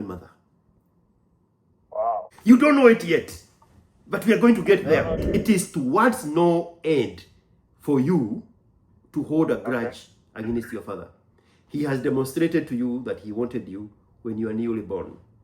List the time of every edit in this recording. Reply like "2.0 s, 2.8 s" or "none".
2.3 s, 5.2 s